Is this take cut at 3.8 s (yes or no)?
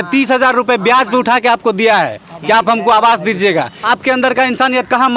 yes